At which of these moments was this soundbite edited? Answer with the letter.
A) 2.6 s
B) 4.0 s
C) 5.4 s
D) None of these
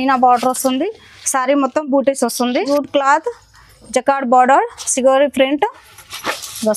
A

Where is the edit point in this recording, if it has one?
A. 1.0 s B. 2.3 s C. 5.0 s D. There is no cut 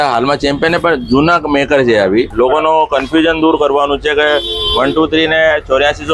B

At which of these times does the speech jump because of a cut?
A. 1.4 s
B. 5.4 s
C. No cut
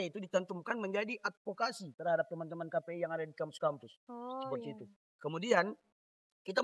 C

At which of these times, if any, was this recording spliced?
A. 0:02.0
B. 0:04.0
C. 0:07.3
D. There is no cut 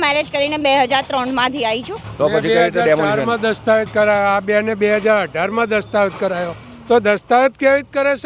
A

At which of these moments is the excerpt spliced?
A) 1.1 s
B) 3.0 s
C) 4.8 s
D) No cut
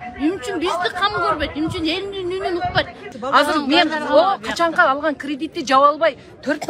B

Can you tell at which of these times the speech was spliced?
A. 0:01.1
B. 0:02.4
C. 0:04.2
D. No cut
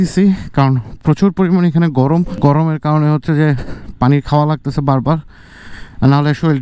B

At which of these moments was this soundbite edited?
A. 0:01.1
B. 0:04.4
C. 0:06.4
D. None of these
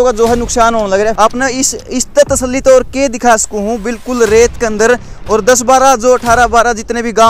A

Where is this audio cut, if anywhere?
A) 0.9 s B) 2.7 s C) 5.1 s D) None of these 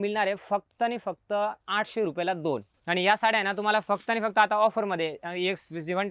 B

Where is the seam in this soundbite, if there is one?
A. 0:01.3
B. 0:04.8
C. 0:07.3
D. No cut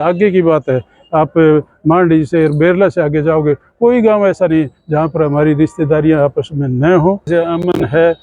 C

